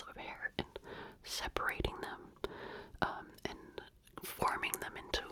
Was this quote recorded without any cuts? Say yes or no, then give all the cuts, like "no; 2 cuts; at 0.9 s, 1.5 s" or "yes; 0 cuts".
yes; 0 cuts